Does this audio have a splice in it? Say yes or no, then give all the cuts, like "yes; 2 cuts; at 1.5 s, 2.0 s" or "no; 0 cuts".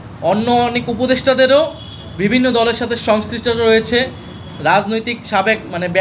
no; 0 cuts